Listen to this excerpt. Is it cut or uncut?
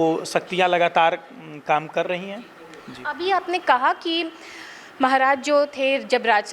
uncut